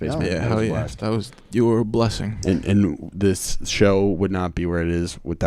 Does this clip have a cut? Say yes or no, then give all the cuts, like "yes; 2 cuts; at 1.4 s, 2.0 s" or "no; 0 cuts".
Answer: no; 0 cuts